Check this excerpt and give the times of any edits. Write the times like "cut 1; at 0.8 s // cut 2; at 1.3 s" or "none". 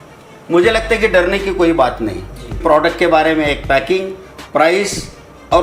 cut 1; at 2.6 s